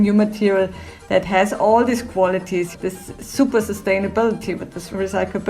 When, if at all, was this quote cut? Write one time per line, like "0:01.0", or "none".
0:02.7